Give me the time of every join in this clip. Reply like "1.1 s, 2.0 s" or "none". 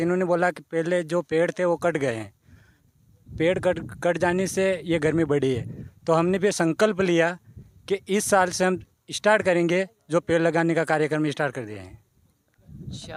none